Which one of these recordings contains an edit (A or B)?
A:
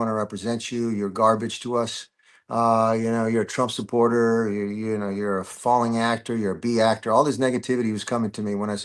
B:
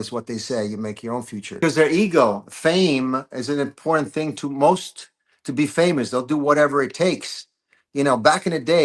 B